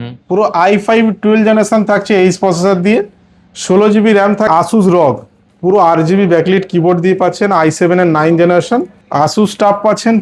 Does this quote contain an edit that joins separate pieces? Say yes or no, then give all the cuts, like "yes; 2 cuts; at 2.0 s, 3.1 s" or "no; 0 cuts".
yes; 2 cuts; at 4.5 s, 9.0 s